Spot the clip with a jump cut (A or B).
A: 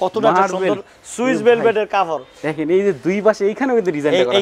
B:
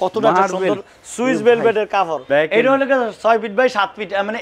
B